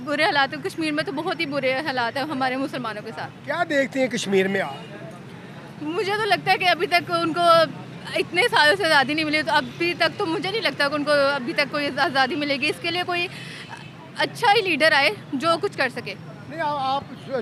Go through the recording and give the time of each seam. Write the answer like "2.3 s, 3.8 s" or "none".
none